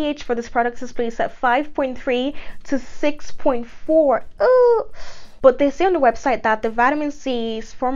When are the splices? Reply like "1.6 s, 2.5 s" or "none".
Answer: none